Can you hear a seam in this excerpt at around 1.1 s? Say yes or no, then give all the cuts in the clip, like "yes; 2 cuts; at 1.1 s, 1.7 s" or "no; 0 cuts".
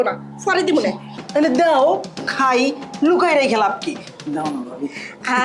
yes; 1 cut; at 1.1 s